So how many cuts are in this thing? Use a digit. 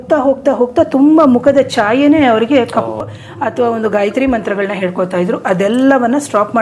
1